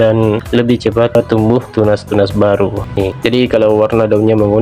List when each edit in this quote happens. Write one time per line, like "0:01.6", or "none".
0:03.0